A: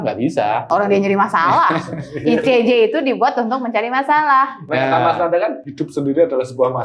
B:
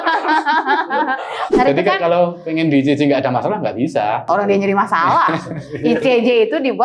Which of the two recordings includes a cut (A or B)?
B